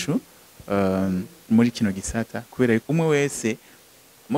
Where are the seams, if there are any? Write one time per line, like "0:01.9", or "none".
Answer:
0:02.8

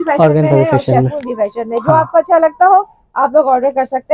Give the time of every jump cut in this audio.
none

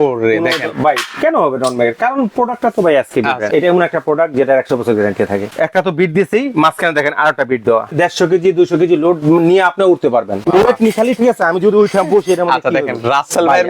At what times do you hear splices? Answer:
0:03.5
0:05.5
0:07.9
0:10.4

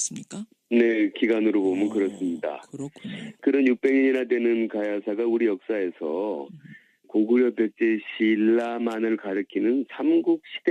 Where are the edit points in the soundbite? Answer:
0:05.6

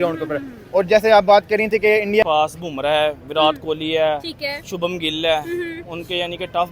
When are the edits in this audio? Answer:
0:02.2

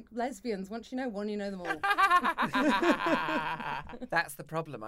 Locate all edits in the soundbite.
0:03.9

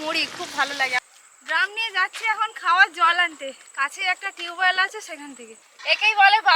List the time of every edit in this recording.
0:01.0
0:05.7

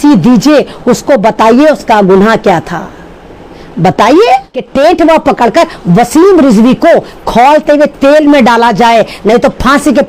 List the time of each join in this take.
0:04.6

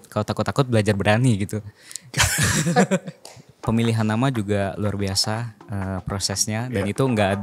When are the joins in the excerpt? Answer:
0:03.6

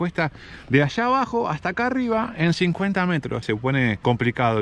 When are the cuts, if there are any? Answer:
0:03.7

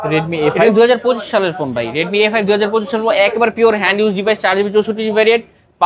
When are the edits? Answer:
none

